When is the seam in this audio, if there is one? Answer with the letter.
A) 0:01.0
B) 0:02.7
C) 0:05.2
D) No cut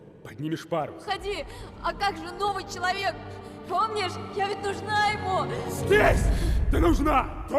A